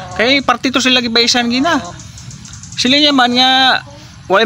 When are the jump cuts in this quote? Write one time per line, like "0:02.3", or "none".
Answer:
none

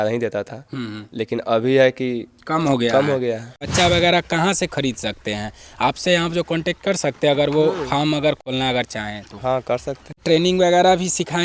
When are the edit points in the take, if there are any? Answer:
0:03.6
0:08.5
0:10.2

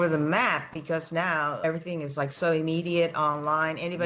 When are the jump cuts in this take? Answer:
0:01.6

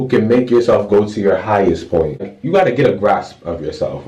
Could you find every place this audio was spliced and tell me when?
0:02.4

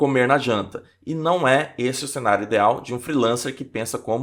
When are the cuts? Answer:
none

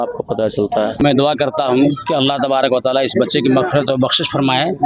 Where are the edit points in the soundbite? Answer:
0:01.0

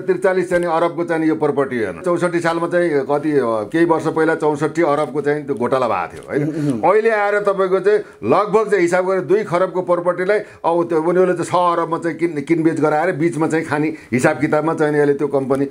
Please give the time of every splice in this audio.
0:02.0

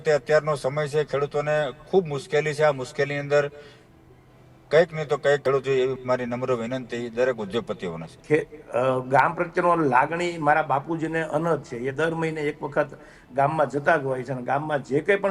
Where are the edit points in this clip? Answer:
0:08.1

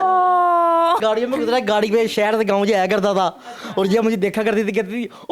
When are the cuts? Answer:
0:01.0

